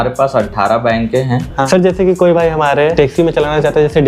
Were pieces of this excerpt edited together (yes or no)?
yes